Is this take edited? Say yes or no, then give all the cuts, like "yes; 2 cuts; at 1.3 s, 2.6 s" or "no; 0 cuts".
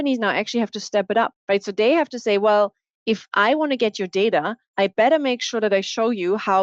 yes; 2 cuts; at 1.4 s, 4.6 s